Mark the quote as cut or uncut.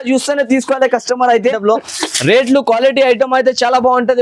cut